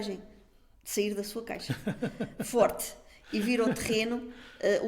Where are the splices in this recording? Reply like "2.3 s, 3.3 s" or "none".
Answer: none